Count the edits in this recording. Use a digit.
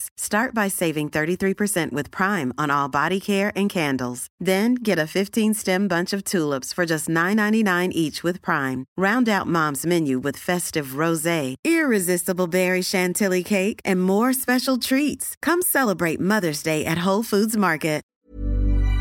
1